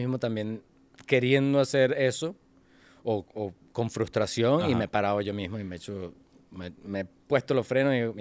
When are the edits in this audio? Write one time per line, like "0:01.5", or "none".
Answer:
none